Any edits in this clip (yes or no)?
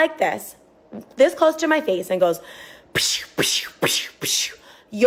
no